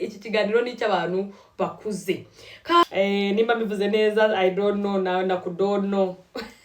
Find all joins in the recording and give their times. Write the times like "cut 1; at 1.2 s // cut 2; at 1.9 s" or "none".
cut 1; at 2.8 s